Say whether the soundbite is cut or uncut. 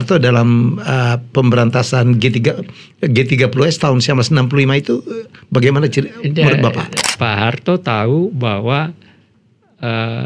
cut